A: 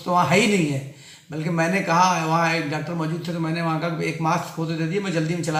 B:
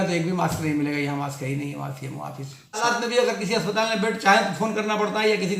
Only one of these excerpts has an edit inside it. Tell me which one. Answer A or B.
B